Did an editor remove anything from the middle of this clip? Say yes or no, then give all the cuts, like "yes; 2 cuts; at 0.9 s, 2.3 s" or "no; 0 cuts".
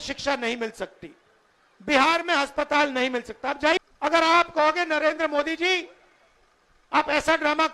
yes; 1 cut; at 3.8 s